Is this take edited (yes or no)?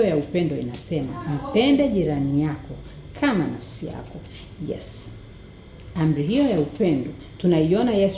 no